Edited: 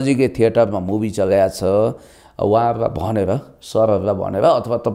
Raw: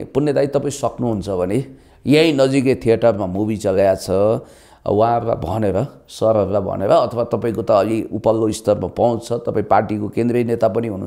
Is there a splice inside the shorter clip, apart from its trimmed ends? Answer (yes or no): no